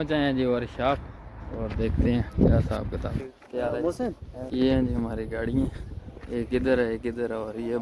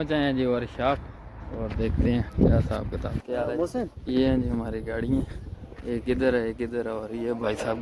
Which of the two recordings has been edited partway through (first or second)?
second